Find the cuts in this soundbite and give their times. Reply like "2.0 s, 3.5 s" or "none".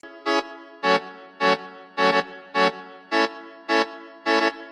none